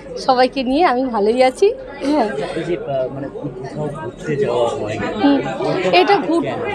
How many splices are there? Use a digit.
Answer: 0